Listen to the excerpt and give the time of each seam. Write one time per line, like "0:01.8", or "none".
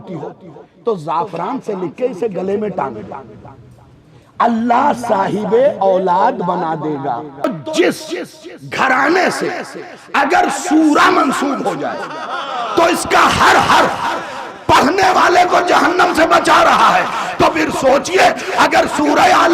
0:07.4